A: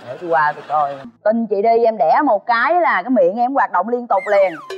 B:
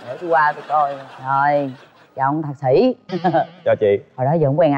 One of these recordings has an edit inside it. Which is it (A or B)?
A